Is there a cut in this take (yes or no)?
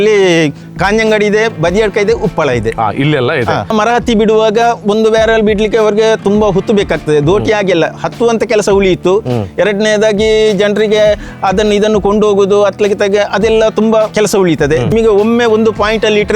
yes